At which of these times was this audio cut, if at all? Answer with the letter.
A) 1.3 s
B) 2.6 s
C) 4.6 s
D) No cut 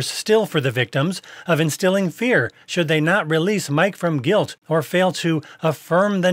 C